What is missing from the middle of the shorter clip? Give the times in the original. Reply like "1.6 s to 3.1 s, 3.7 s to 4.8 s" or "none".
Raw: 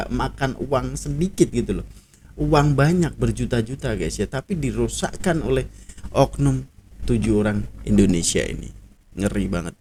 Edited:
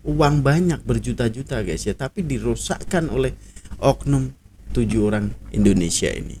none